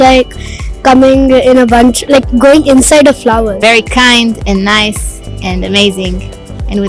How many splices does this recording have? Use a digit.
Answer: 1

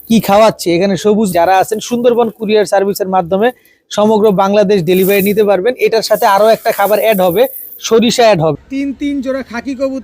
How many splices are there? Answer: 2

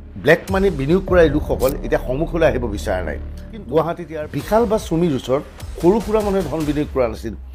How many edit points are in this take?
1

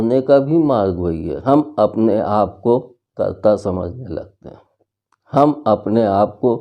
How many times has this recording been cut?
1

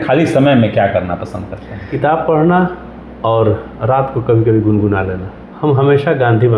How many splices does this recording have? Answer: 2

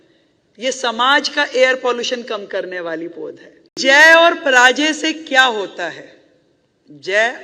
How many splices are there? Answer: 1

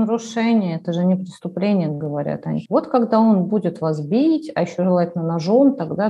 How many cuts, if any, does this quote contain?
1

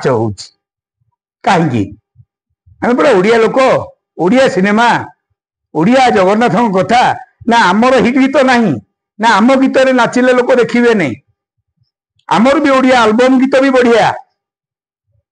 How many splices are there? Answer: 0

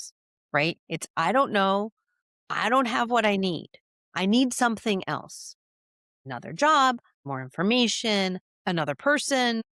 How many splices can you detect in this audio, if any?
3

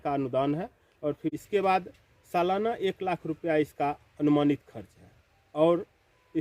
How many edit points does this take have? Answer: 1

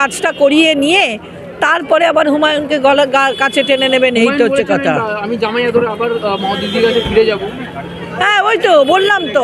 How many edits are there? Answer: 0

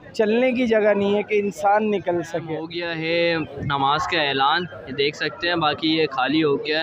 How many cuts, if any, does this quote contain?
1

